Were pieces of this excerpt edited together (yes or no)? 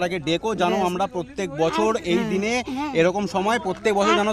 no